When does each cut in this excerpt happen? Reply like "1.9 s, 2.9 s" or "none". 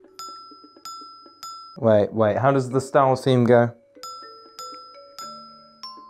none